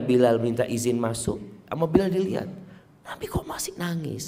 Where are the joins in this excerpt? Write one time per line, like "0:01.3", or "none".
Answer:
0:01.6